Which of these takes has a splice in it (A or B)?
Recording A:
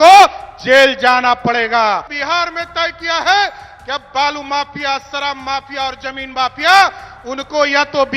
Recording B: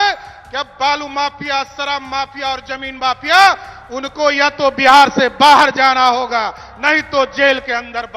A